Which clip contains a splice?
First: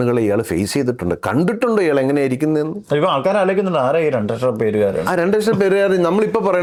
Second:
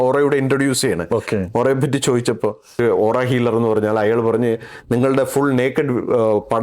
second; 1 cut; at 2.8 s

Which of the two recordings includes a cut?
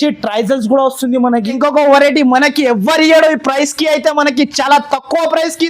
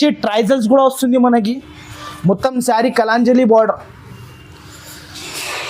first; 1 cut; at 1.5 s

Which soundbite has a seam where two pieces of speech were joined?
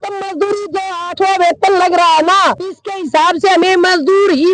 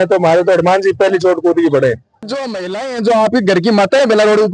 second; 1 cut; at 2.3 s

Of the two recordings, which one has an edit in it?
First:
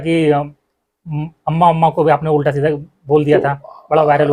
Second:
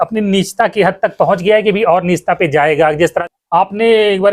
second; 1 cut; at 3.2 s

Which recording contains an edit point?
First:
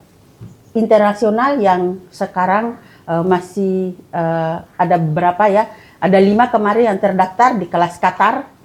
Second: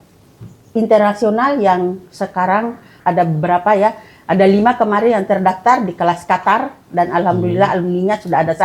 second; 1 cut; at 2.9 s

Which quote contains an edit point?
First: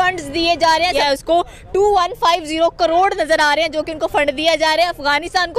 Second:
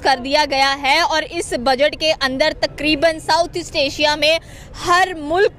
first; 1 cut; at 1.0 s

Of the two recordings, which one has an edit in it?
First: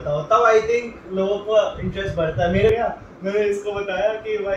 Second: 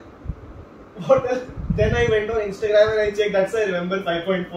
first; 1 cut; at 2.7 s

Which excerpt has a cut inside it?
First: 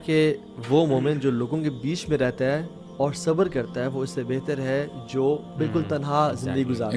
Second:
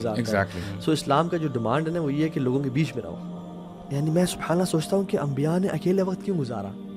second; 1 cut; at 3.2 s

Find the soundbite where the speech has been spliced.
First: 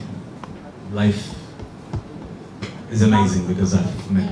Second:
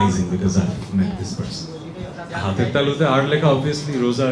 second; 1 cut; at 2.3 s

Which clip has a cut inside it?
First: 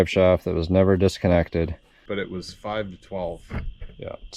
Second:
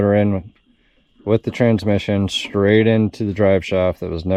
first; 1 cut; at 1.9 s

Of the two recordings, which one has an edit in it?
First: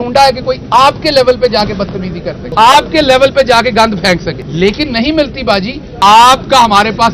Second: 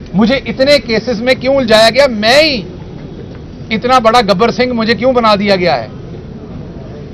first; 3 cuts; at 2.4 s, 4.4 s, 5.8 s

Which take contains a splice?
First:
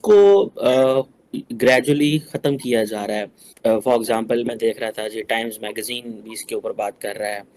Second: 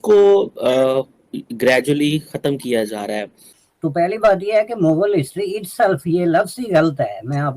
second; 1 cut; at 3.5 s

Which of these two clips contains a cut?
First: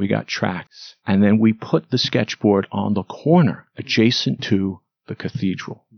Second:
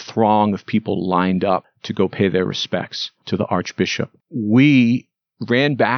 second; 2 cuts; at 1.8 s, 4.2 s

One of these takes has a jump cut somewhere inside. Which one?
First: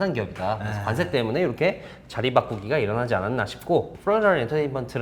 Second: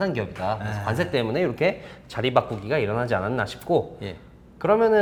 first; 1 cut; at 3.9 s

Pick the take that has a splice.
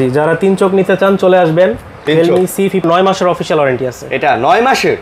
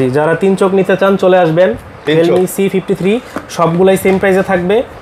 first; 1 cut; at 2.8 s

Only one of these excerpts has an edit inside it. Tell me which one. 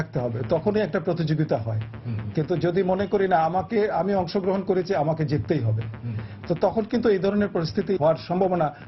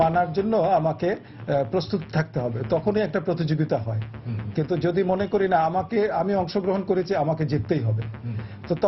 first; 1 cut; at 8.0 s

